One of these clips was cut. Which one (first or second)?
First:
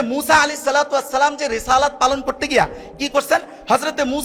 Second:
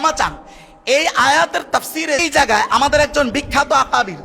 second